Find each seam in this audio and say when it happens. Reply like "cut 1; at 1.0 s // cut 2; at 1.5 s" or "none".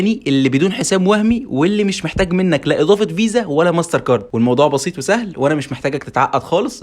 cut 1; at 4.3 s